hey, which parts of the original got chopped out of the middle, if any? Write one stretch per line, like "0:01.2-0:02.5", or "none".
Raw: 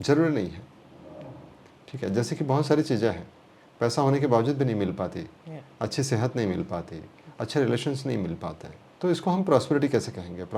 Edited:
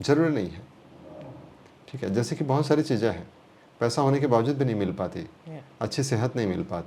none